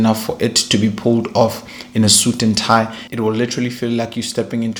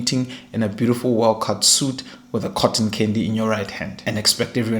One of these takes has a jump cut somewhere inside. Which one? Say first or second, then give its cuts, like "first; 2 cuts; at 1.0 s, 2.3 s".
second; 1 cut; at 3.9 s